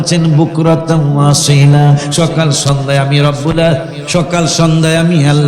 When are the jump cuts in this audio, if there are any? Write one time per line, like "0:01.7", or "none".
0:04.0